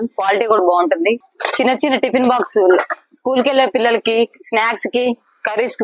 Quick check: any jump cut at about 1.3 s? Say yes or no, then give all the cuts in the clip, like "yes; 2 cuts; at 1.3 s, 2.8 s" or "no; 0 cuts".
yes; 1 cut; at 1.3 s